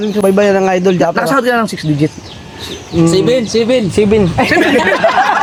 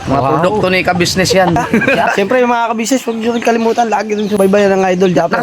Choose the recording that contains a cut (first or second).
second